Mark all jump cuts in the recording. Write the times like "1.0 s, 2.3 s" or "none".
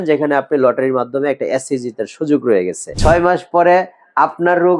2.8 s